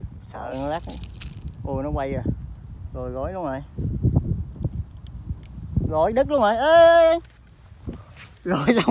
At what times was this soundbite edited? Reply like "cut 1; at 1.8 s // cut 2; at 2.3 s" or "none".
cut 1; at 6.4 s